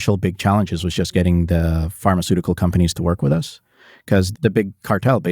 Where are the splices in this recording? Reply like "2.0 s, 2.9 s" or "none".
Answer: 4.3 s